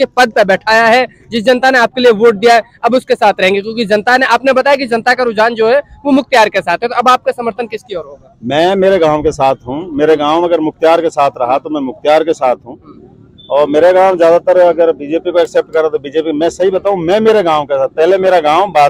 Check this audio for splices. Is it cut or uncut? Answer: uncut